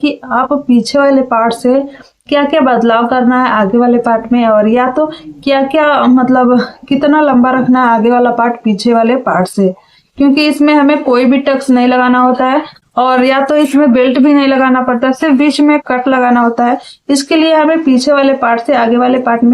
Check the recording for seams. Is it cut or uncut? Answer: cut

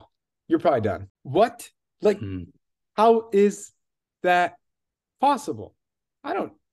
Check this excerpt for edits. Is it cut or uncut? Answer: cut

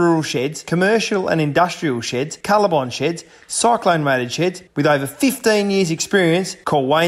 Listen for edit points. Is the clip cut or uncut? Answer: uncut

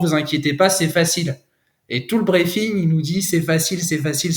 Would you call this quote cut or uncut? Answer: uncut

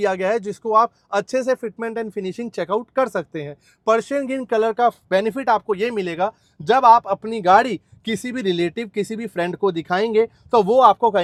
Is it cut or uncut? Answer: uncut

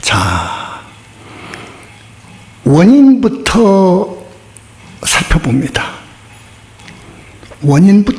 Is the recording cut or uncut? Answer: cut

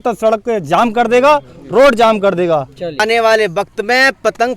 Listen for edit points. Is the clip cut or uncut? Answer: cut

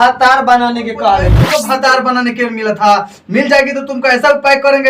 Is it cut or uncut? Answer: cut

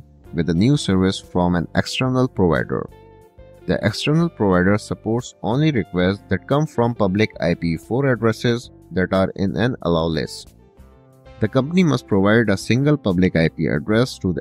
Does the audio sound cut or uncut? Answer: uncut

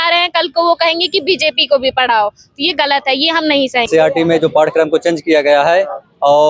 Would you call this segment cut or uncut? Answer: cut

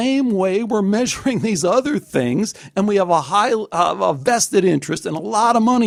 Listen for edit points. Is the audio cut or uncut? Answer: uncut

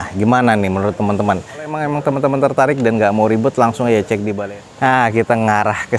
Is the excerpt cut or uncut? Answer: cut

